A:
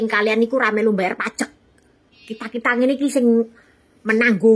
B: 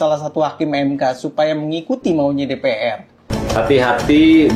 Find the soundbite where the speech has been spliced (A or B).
B